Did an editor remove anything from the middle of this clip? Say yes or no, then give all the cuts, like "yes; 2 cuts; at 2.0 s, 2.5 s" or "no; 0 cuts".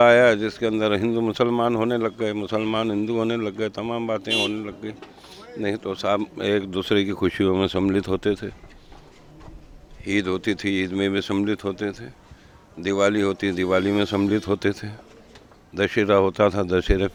no; 0 cuts